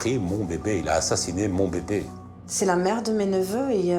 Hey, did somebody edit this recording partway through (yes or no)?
yes